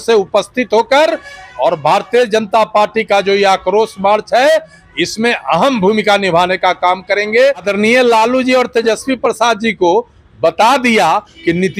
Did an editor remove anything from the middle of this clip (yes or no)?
yes